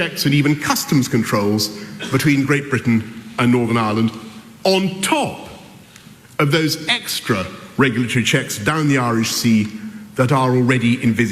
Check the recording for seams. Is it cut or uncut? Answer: cut